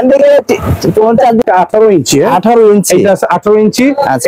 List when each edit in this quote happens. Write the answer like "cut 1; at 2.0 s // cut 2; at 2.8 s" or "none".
cut 1; at 1.4 s

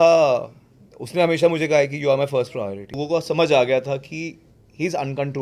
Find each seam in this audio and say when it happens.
cut 1; at 3.0 s

